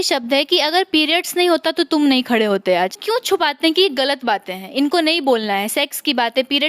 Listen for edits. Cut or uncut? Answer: cut